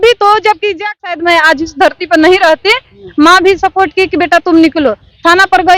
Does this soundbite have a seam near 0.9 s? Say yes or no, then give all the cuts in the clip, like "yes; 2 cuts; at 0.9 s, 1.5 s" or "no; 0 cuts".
yes; 1 cut; at 0.9 s